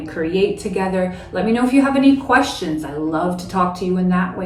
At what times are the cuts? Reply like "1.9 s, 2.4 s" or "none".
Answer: none